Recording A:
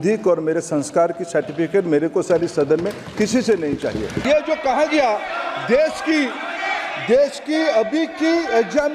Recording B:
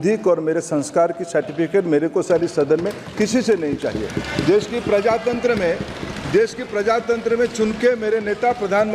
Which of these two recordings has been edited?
A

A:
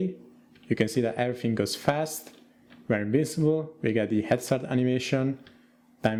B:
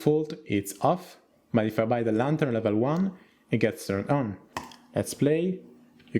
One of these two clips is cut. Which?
B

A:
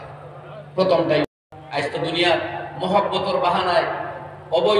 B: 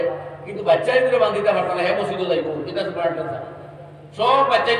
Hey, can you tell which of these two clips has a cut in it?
A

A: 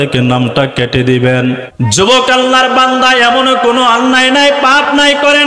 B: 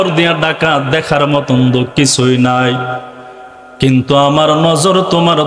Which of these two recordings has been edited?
A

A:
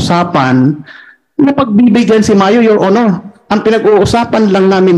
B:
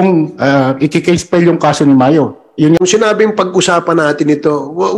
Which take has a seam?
B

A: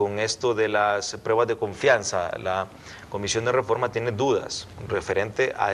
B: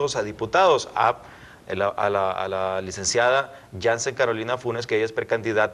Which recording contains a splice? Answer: A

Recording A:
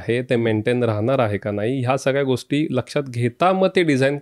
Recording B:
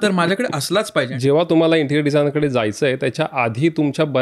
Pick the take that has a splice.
B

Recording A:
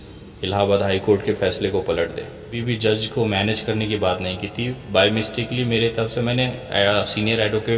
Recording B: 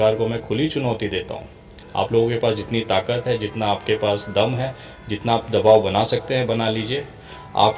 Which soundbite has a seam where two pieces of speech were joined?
A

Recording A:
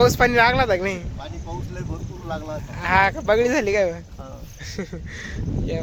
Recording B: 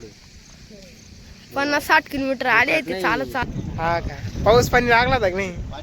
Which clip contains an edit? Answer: B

